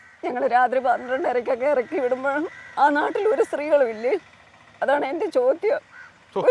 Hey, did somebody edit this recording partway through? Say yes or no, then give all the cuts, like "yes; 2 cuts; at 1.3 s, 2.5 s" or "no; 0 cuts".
no; 0 cuts